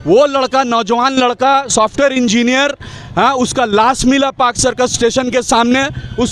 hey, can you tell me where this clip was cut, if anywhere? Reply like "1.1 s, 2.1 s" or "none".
none